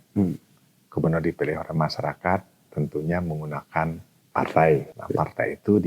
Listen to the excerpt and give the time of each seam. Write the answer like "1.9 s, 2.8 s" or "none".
4.1 s, 5.0 s

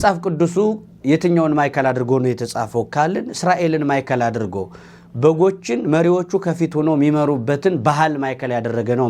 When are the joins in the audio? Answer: none

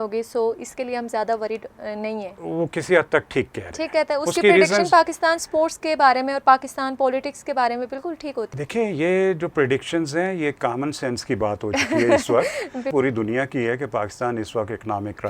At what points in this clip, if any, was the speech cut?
2.4 s, 8.5 s, 12.9 s

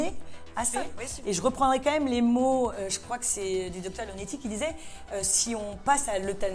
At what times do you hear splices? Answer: 0.9 s

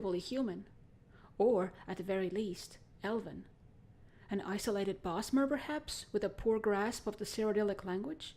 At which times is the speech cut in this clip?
5.2 s

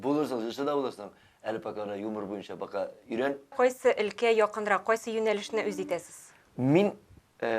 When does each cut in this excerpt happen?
3.5 s

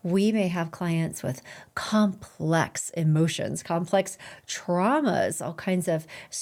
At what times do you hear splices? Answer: none

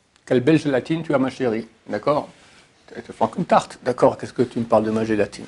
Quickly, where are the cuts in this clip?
none

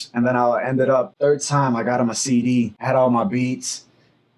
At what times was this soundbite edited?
1.1 s, 2.8 s

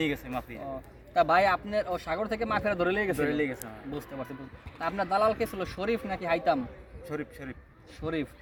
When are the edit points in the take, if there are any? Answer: none

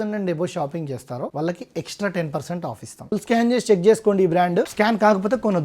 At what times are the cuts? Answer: 1.3 s, 3.2 s, 4.7 s

